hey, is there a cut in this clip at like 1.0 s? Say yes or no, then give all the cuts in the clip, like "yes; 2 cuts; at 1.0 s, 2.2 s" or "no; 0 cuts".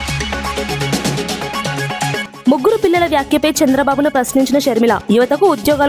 no; 1 cut; at 2.2 s